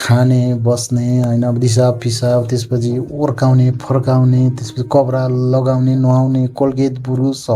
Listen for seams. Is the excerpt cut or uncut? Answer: uncut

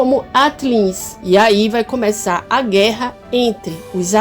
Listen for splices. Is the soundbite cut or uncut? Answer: cut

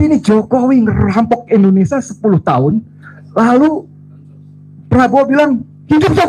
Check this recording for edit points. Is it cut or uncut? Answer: uncut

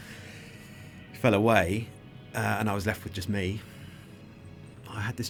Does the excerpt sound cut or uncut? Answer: uncut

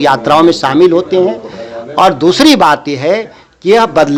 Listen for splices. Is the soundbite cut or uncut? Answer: uncut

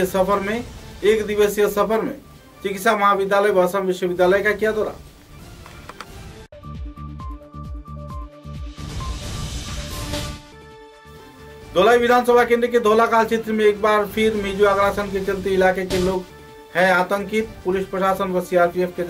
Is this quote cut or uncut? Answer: uncut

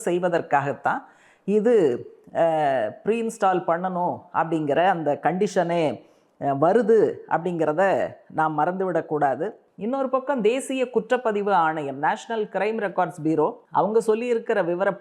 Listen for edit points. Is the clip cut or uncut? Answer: cut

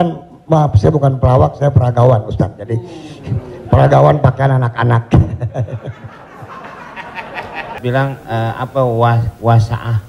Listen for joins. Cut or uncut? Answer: cut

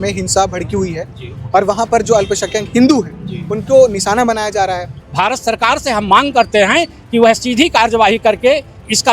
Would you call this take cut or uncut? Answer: cut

